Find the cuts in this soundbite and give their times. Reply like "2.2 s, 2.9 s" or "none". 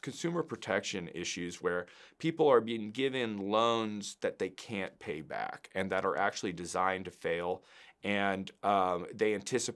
none